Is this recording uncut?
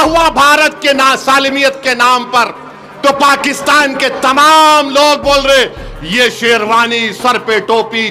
yes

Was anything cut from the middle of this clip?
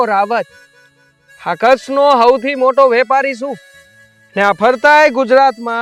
no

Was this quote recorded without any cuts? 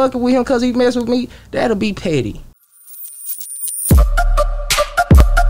no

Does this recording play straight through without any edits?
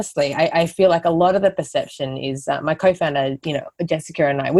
yes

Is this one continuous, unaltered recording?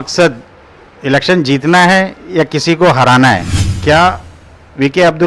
no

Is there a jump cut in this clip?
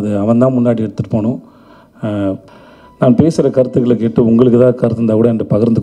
yes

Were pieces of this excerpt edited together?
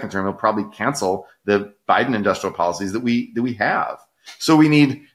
no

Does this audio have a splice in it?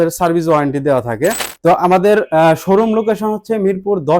yes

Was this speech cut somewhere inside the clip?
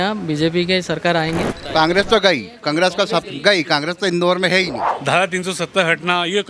yes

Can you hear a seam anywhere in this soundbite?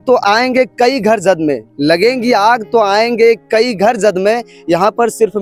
no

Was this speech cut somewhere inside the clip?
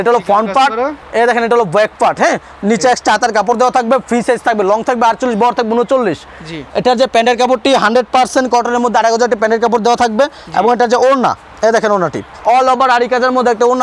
no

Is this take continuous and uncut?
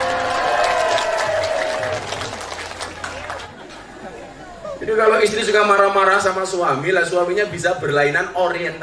no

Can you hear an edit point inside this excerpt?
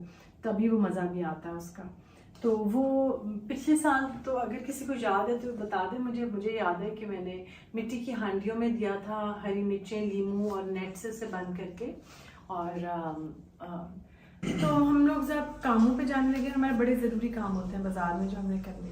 yes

